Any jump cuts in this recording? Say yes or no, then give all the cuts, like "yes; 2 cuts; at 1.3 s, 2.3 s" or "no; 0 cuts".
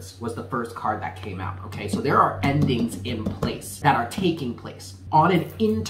yes; 2 cuts; at 3.8 s, 5.0 s